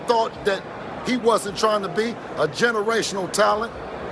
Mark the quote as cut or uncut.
uncut